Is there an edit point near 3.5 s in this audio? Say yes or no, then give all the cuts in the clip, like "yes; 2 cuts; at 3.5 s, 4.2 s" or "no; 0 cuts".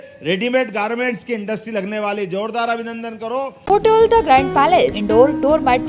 yes; 2 cuts; at 3.5 s, 5.0 s